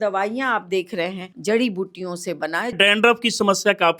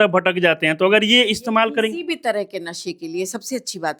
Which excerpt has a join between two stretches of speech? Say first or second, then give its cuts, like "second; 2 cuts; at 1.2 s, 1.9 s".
first; 2 cuts; at 1.3 s, 2.7 s